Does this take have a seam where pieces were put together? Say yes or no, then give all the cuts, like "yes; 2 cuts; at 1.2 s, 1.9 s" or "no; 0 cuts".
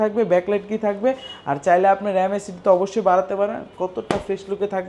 no; 0 cuts